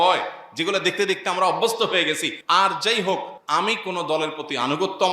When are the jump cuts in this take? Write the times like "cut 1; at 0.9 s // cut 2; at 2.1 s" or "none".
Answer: cut 1; at 2.3 s // cut 2; at 3.4 s

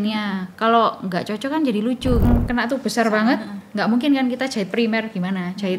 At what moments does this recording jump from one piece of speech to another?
cut 1; at 2.2 s

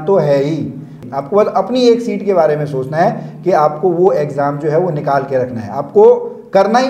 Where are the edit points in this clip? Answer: cut 1; at 1.0 s

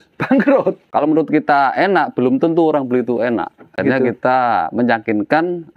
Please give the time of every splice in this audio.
cut 1; at 0.8 s // cut 2; at 3.8 s

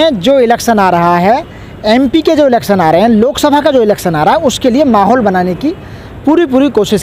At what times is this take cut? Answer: none

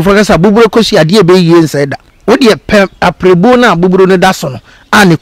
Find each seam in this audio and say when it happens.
cut 1; at 2.1 s

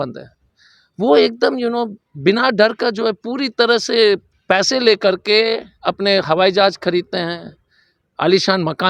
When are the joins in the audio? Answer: cut 1; at 2.0 s // cut 2; at 4.3 s

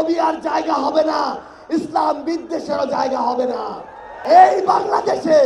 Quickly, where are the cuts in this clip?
cut 1; at 4.1 s

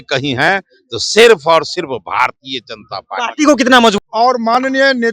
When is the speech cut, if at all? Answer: cut 1; at 4.0 s

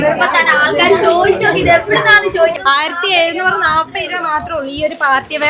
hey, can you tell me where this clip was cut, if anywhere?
cut 1; at 2.6 s

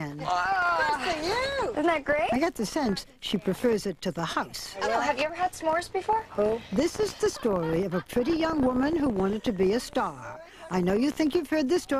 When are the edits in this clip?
cut 1; at 7.5 s

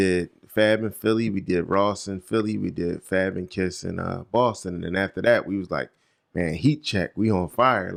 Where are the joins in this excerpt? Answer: none

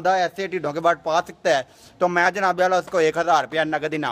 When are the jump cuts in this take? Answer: none

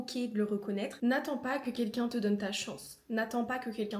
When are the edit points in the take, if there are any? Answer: cut 1; at 0.9 s

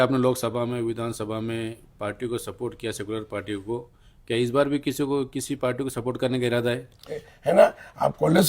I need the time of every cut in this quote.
cut 1; at 7.3 s

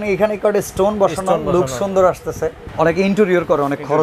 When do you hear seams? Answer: cut 1; at 2.6 s

